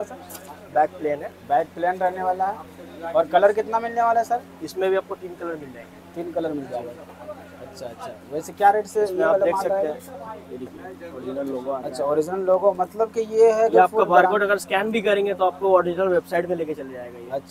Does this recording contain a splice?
no; 0 cuts

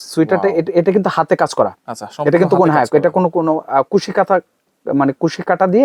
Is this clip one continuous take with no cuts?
yes; 0 cuts

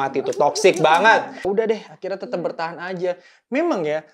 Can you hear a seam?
yes; 1 cut; at 1.4 s

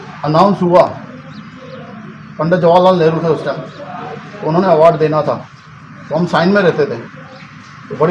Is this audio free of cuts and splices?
yes; 0 cuts

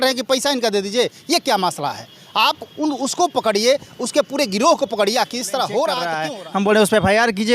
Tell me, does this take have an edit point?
yes; 1 cut; at 6.2 s

